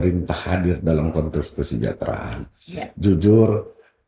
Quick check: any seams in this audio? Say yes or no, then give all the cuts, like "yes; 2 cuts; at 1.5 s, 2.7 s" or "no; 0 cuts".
no; 0 cuts